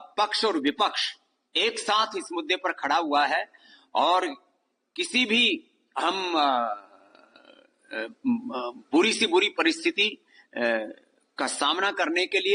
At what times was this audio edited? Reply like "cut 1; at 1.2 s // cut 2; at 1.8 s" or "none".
none